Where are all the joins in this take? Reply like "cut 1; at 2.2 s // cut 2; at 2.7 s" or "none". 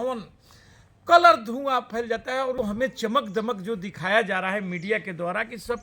cut 1; at 2.6 s